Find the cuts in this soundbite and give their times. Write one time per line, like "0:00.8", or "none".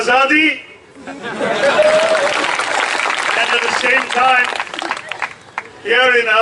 0:02.5